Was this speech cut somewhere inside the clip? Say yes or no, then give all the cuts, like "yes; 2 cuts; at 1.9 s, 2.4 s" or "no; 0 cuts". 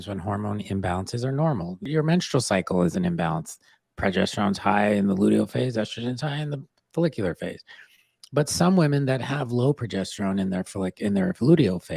yes; 1 cut; at 1.9 s